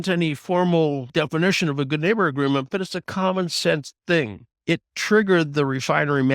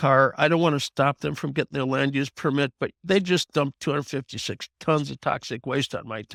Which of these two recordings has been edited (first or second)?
first